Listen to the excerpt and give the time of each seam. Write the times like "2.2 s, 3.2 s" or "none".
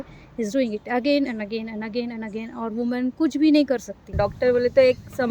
4.1 s